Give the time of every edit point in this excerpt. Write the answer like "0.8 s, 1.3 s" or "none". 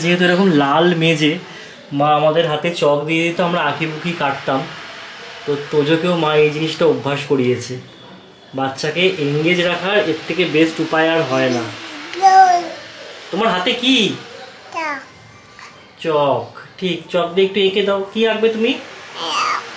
none